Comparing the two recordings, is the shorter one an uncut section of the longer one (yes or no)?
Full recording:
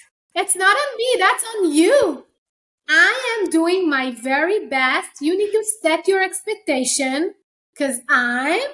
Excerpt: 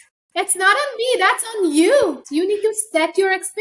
no